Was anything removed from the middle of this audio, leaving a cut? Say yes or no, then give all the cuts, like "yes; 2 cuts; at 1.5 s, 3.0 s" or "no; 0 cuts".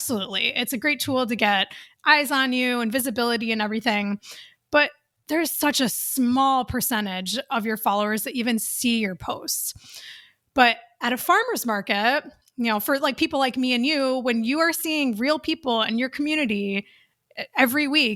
no; 0 cuts